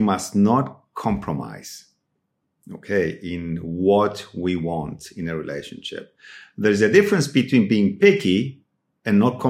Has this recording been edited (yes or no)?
no